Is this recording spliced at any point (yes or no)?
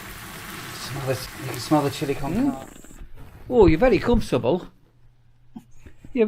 yes